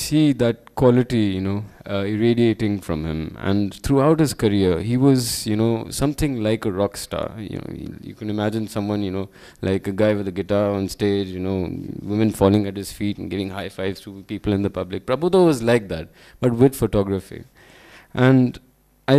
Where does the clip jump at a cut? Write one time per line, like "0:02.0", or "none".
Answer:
none